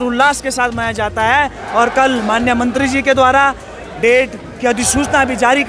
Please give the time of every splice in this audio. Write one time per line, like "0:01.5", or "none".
none